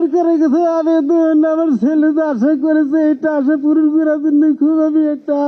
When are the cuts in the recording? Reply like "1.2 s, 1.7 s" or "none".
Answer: none